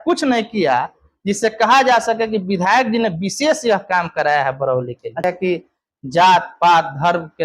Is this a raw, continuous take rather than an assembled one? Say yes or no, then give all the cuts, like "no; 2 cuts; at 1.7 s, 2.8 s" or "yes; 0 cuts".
no; 1 cut; at 5.2 s